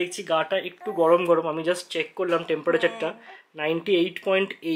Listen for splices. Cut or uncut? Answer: uncut